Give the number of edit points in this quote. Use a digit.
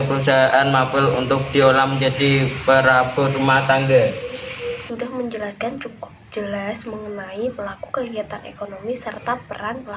1